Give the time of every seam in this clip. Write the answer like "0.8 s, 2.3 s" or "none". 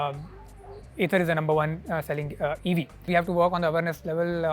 3.1 s